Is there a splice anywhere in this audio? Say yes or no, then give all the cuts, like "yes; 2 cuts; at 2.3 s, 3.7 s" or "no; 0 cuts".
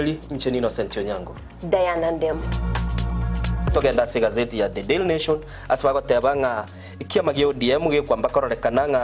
no; 0 cuts